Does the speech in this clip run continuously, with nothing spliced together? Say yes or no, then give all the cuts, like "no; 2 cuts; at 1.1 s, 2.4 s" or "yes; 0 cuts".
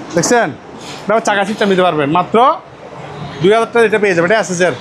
yes; 0 cuts